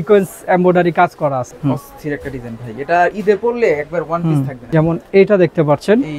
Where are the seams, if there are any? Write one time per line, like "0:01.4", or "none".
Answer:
0:01.5
0:04.6